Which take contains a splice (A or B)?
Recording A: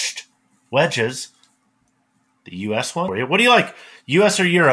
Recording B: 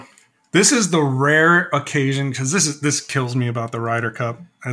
A